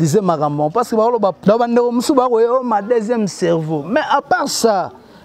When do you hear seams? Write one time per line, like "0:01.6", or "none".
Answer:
0:01.4